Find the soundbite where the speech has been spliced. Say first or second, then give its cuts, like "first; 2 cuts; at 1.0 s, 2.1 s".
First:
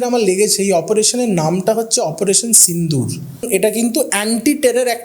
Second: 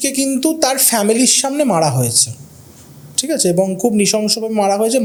first; 1 cut; at 3.4 s